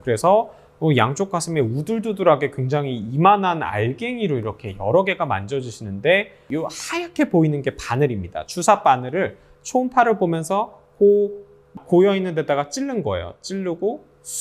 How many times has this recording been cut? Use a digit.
2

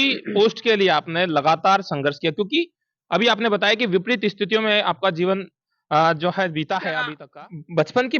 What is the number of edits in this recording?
1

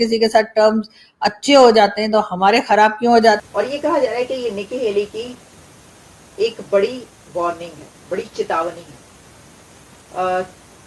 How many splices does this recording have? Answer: 1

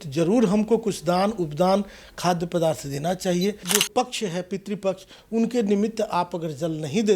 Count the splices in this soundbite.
1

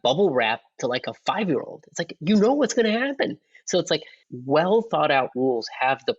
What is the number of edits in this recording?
1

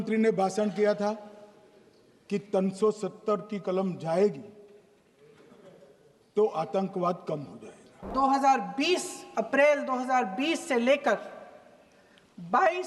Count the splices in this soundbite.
1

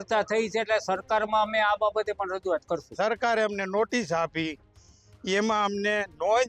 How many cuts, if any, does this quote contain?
1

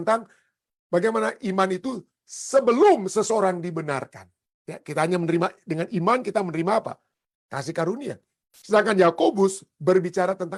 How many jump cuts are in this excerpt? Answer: 0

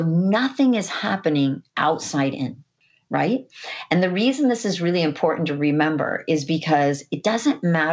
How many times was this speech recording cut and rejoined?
1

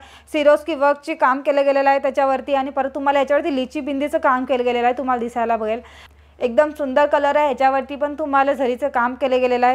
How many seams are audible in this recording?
1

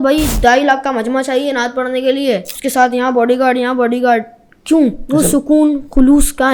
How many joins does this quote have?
2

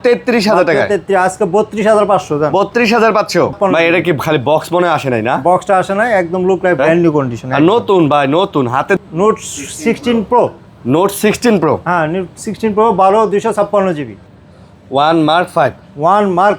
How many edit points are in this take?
3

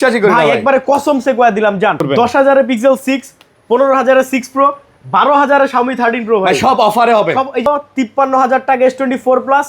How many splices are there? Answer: 2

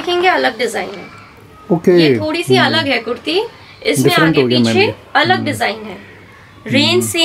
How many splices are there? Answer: 0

